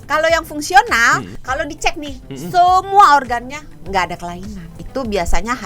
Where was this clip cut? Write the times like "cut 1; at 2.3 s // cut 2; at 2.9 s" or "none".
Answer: cut 1; at 1.4 s // cut 2; at 4.7 s